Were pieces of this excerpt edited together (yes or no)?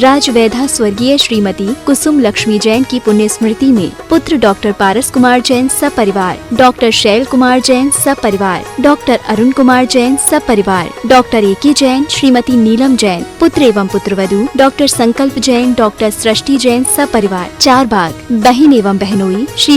no